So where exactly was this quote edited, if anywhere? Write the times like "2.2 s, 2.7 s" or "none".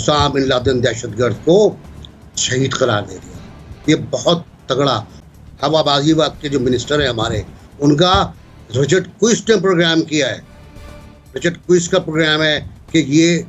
5.2 s